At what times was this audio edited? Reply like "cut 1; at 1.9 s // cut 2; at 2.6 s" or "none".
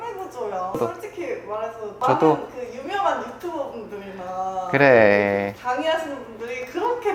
cut 1; at 2.0 s